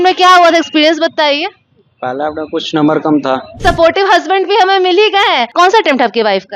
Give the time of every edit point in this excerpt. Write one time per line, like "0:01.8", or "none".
0:03.6
0:05.5